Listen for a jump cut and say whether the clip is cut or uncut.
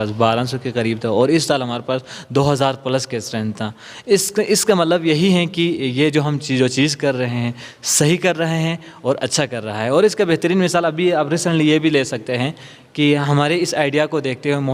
uncut